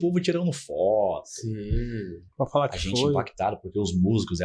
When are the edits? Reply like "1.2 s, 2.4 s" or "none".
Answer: none